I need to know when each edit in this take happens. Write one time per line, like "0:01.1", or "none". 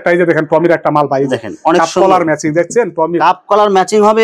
none